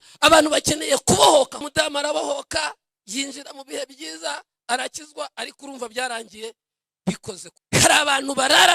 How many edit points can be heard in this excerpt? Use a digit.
2